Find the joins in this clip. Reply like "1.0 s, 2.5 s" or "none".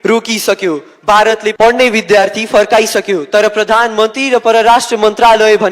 1.5 s